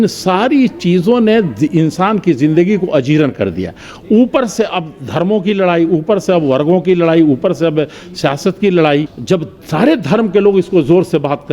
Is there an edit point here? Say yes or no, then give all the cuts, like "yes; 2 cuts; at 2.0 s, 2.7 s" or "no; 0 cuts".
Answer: yes; 1 cut; at 9.1 s